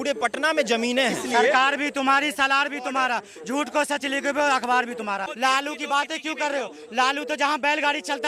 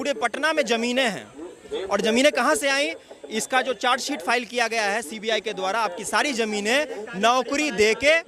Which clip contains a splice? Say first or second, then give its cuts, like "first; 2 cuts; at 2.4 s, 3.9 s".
first; 2 cuts; at 1.2 s, 5.3 s